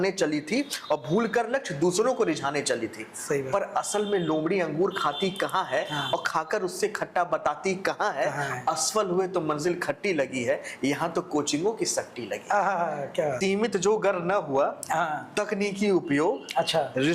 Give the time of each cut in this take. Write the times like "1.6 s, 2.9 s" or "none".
13.4 s